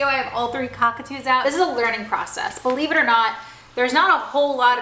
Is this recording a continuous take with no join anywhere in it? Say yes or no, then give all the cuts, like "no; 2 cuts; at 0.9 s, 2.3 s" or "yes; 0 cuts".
no; 1 cut; at 1.4 s